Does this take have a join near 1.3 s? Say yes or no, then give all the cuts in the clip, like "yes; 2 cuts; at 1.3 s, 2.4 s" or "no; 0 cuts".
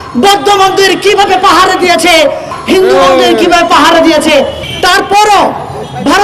no; 2 cuts; at 2.5 s, 4.6 s